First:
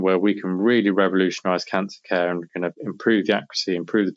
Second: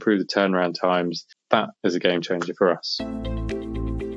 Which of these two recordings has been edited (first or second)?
second